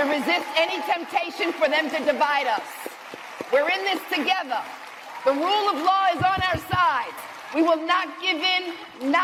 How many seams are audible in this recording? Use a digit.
0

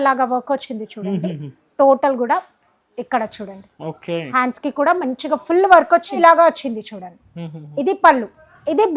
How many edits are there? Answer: 1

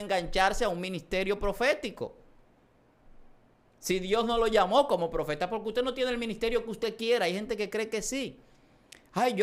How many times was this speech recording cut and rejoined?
0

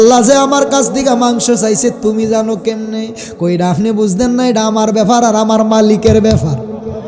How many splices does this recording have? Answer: 0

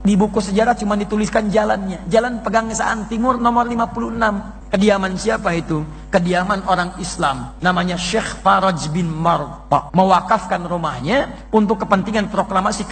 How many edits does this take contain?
3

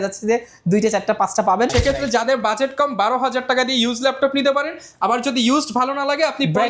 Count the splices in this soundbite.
1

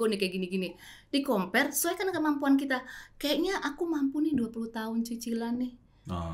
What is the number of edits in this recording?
0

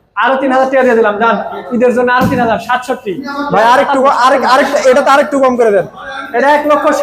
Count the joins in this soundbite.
0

